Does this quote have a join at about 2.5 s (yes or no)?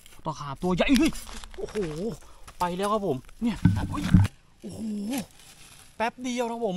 no